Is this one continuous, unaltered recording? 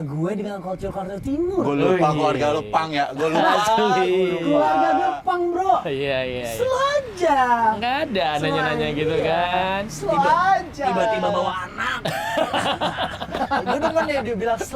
yes; 0 cuts

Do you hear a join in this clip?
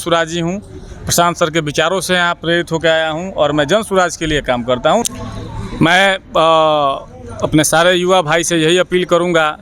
yes; 1 cut; at 5.0 s

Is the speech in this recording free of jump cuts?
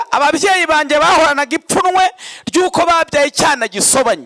yes; 0 cuts

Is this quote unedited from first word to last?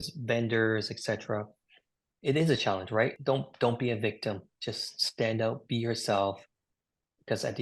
no; 1 cut; at 3.2 s

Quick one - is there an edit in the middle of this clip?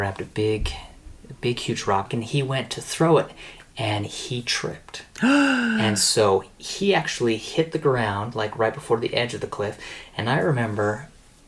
yes; 1 cut; at 2.1 s

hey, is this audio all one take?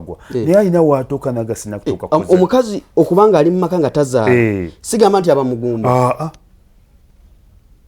yes; 0 cuts

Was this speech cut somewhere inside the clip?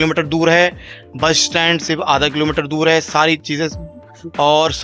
no; 0 cuts

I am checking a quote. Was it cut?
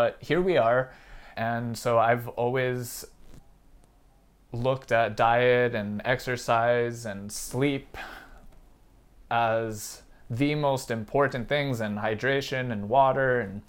yes; 1 cut; at 1.3 s

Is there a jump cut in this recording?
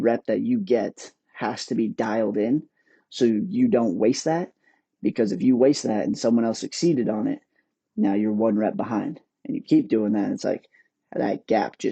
no; 0 cuts

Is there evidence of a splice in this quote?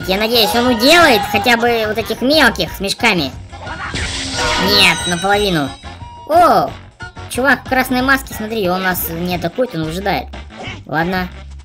no; 0 cuts

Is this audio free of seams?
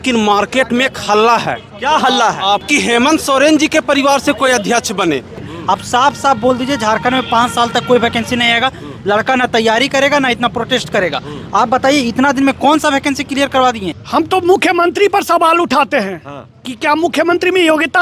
no; 3 cuts; at 2.6 s, 5.5 s, 13.9 s

